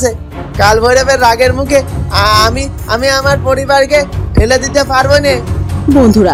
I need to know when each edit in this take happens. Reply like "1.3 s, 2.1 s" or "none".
none